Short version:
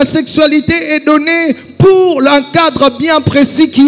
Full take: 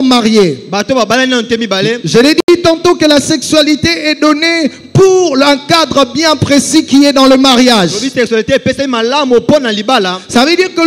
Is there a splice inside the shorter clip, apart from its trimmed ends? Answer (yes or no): no